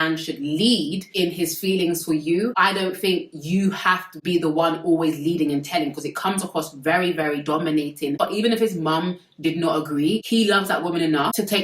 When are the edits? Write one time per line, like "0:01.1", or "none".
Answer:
0:08.2